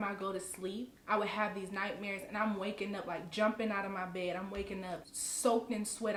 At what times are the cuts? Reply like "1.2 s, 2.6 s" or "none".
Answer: none